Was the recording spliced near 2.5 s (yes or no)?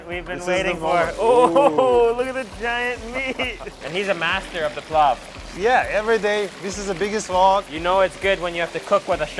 no